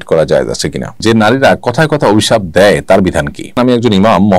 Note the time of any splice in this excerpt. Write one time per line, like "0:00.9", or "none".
0:01.0
0:03.5